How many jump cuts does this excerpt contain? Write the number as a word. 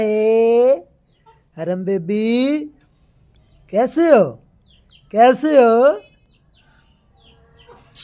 zero